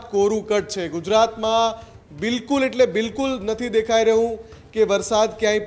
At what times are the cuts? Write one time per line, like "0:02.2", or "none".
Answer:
none